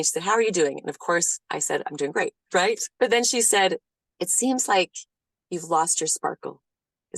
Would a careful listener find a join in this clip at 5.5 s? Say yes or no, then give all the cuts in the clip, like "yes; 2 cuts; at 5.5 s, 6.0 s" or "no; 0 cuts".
no; 1 cut; at 2.5 s